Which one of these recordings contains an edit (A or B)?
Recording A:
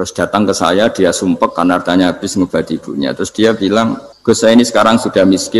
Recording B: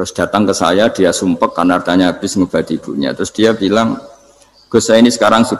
A